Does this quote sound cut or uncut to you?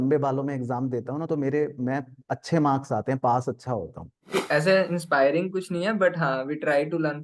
cut